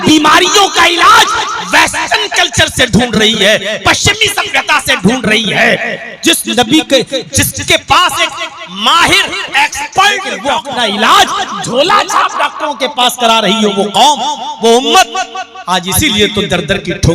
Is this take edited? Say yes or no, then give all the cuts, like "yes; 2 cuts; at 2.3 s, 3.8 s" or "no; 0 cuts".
yes; 1 cut; at 10.3 s